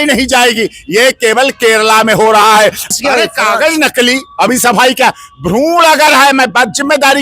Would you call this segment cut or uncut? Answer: cut